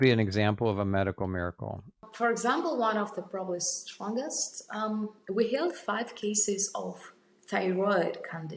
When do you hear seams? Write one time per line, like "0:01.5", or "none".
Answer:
0:02.1